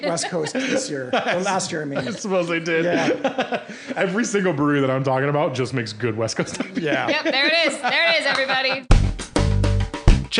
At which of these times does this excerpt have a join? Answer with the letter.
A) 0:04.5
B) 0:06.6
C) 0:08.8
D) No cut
C